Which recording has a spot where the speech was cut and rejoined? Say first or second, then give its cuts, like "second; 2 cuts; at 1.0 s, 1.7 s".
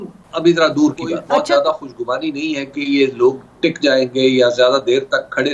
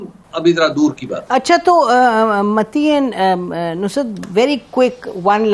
first; 1 cut; at 1.1 s